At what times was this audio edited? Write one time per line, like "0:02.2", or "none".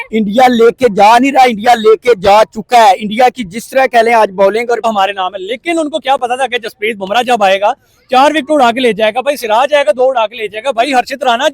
0:04.8